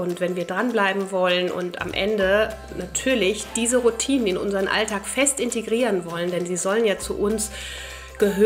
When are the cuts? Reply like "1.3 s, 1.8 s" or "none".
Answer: none